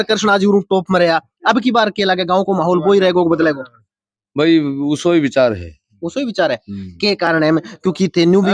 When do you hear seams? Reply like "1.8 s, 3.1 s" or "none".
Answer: none